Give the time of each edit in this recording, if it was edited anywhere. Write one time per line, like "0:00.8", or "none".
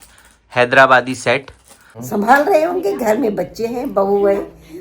0:01.9

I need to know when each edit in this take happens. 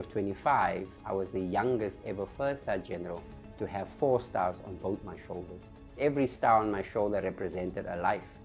0:00.9
0:05.9

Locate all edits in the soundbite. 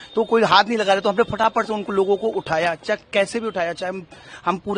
none

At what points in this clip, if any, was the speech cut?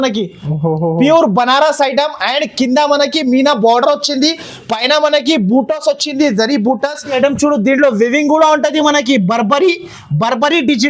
0:07.2

